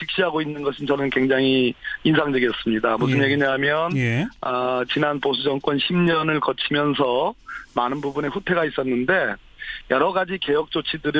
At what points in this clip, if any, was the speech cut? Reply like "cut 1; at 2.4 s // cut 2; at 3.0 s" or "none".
cut 1; at 4.7 s